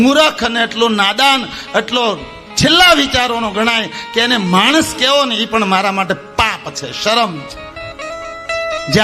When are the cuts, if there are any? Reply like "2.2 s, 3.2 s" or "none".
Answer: none